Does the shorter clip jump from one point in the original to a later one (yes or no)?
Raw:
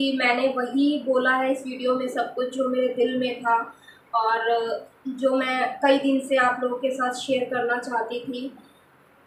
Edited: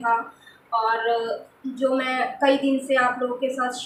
no